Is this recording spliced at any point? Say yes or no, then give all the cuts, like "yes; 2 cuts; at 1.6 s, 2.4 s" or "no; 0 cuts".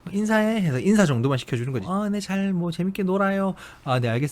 yes; 1 cut; at 1.8 s